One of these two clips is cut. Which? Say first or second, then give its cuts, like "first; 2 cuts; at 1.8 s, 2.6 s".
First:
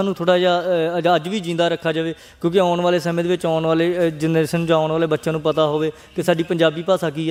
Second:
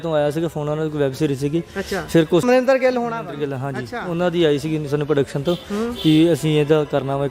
second; 1 cut; at 2.4 s